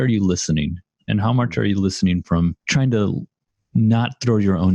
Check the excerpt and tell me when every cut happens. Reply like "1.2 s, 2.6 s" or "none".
2.6 s